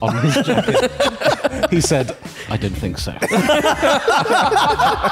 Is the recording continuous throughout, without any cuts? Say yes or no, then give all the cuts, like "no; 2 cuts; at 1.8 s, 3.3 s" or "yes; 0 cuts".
yes; 0 cuts